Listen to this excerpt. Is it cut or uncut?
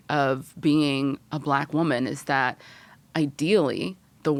uncut